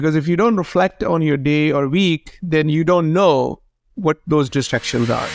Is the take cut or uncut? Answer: uncut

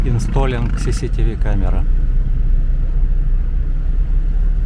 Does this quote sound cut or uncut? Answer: uncut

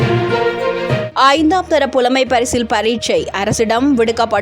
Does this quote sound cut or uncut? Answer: cut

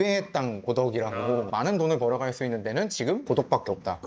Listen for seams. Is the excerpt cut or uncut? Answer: cut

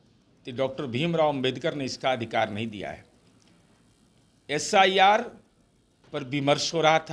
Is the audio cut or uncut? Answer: uncut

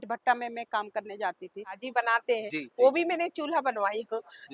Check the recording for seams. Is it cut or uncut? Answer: cut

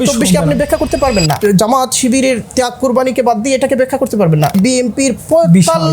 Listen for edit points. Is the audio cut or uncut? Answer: cut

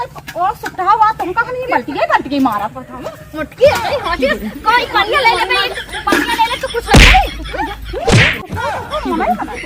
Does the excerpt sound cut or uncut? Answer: cut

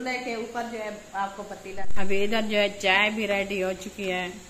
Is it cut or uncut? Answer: cut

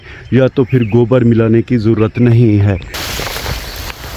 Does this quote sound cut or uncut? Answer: cut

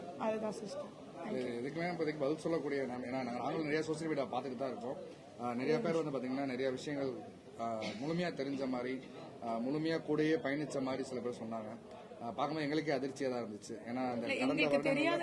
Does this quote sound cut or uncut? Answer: uncut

